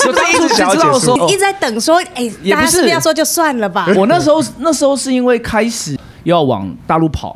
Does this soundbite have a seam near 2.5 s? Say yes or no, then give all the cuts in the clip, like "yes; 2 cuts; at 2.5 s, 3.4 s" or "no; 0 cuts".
no; 2 cuts; at 1.2 s, 5.9 s